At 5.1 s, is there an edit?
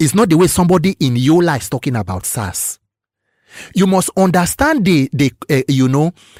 no; 0 cuts

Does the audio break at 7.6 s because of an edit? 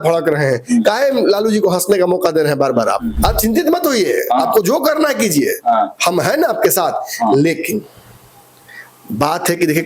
no; 1 cut; at 3.1 s

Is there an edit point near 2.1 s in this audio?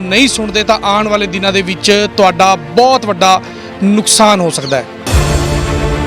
no; 1 cut; at 5.0 s

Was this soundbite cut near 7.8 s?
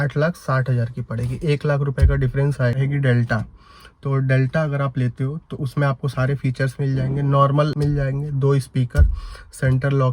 yes; 2 cuts; at 2.8 s, 7.8 s

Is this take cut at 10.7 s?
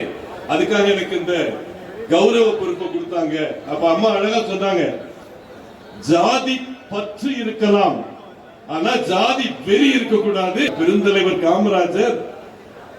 yes; 1 cut; at 10.7 s

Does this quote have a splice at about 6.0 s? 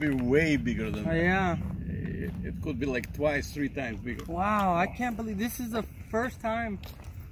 yes; 1 cut; at 6.0 s

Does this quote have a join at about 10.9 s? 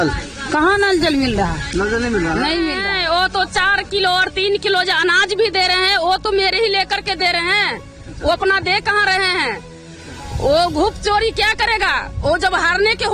no; 1 cut; at 2.8 s

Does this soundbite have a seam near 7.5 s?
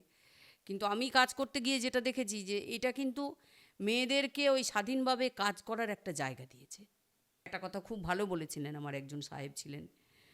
yes; 1 cut; at 7.5 s

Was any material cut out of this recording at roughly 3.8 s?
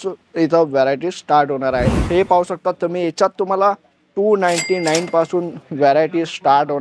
no; 1 cut; at 1.9 s

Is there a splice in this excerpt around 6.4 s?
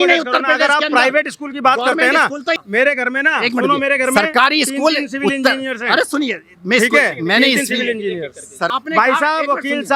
no; 2 cuts; at 2.6 s, 8.7 s

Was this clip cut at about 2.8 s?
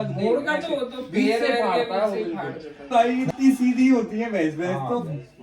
yes; 1 cut; at 2.8 s

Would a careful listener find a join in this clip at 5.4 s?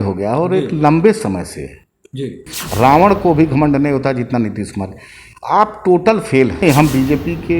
no; 2 cuts; at 2.5 s, 6.6 s

